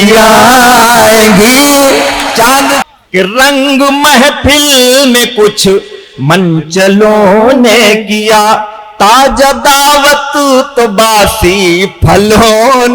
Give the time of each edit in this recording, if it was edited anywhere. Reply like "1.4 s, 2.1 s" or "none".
2.8 s